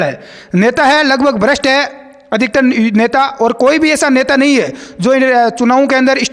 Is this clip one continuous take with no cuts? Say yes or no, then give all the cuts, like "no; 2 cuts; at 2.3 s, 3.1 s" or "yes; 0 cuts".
yes; 0 cuts